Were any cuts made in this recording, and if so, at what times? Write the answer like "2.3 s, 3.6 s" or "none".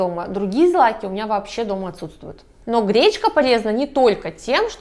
2.5 s